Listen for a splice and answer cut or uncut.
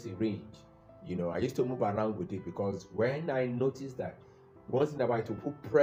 uncut